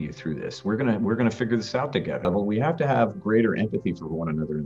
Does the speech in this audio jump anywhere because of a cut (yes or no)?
yes